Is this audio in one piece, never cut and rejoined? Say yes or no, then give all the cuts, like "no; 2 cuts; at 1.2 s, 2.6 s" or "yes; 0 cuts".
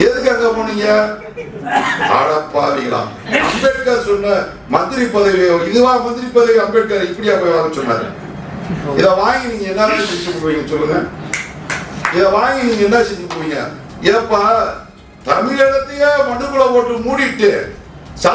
yes; 0 cuts